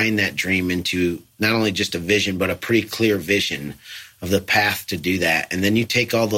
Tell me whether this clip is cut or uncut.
cut